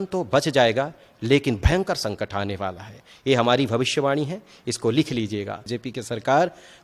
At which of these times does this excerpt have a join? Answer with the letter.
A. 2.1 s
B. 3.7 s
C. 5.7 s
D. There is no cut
C